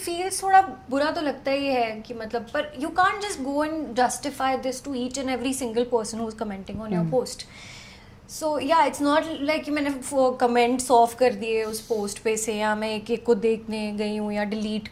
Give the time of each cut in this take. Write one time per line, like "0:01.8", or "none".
none